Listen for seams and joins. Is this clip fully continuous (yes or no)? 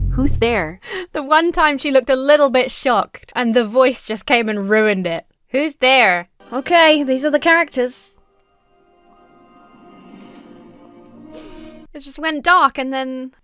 no